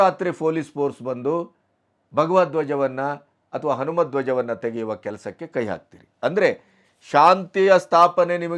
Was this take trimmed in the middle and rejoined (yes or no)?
no